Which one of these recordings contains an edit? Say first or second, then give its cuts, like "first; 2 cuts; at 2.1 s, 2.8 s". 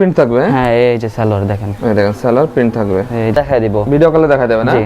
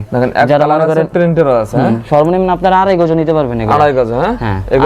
first; 1 cut; at 3.3 s